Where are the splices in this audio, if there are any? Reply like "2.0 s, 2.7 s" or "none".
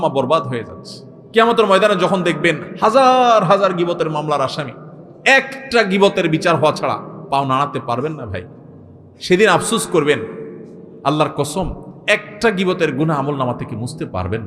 none